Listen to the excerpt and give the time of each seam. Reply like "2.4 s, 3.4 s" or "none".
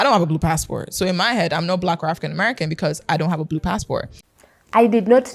4.2 s